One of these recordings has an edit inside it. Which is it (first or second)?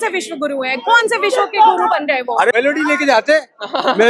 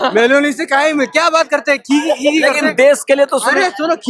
first